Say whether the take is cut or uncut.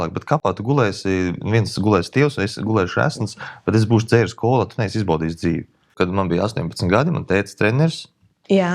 cut